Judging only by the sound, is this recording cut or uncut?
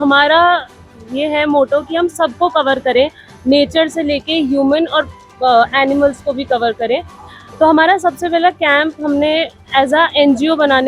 uncut